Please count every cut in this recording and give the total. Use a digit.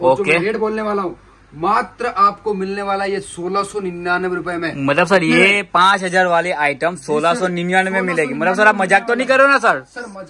0